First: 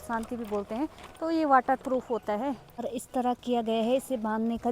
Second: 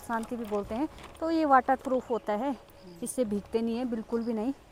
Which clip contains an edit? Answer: first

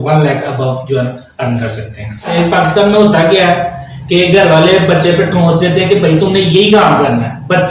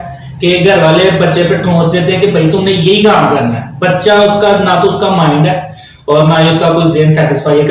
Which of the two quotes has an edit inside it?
first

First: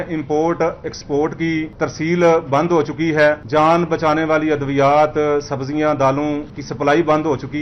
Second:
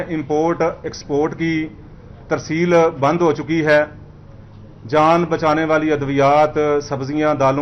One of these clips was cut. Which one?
first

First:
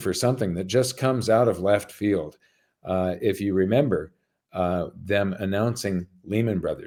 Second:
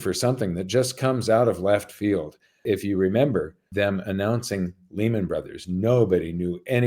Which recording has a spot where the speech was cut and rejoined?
second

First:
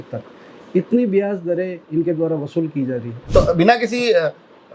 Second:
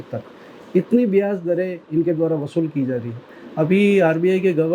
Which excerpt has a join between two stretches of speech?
first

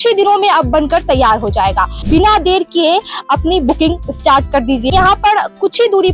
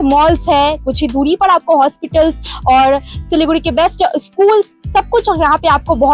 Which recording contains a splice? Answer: first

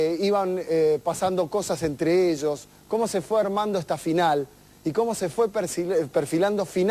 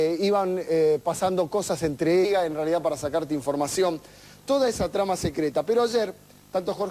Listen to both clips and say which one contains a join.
first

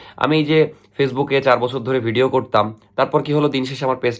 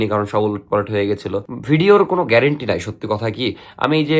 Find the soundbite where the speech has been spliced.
second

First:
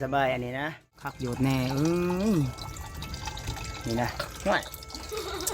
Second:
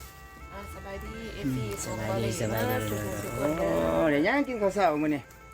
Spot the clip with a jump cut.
first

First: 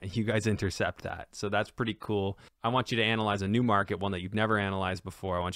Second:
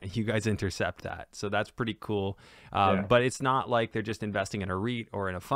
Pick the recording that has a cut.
first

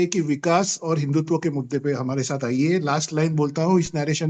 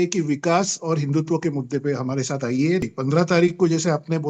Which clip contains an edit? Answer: second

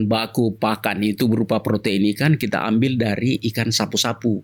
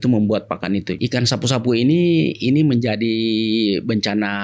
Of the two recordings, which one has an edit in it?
second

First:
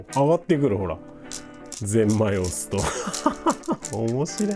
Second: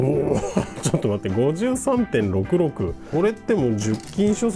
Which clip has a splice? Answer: second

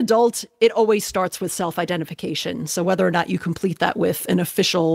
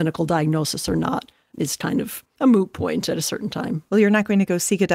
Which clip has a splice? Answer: second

